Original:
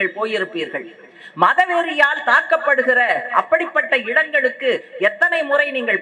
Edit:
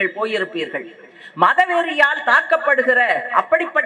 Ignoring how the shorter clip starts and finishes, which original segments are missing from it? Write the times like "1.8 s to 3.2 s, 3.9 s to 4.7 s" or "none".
none